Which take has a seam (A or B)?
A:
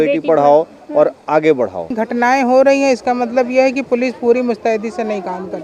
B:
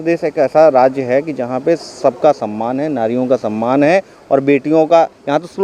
A